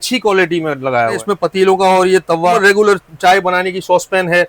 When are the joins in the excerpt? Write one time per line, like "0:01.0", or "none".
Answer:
0:01.2
0:02.6